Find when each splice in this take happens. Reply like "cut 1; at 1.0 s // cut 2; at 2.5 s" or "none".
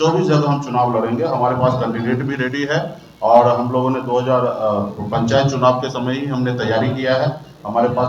none